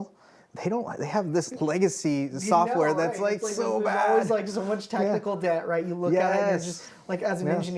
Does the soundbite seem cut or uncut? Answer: uncut